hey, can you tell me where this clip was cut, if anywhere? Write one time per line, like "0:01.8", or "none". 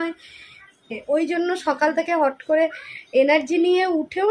0:00.9